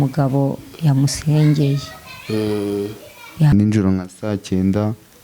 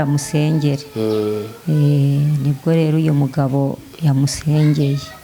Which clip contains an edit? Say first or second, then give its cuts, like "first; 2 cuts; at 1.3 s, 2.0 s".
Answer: first; 1 cut; at 3.5 s